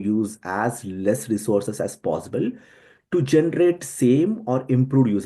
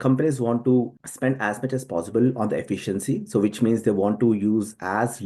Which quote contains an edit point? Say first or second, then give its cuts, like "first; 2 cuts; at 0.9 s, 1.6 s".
second; 1 cut; at 1.0 s